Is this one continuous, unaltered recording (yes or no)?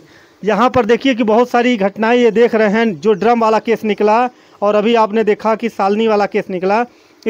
yes